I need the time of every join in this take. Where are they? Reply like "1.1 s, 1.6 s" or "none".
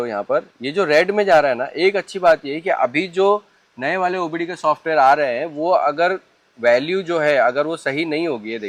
none